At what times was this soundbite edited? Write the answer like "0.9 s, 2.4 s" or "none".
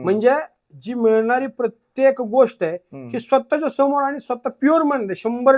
none